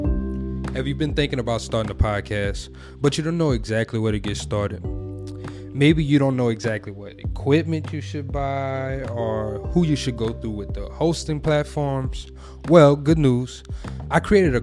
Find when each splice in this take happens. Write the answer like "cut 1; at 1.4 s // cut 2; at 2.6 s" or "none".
none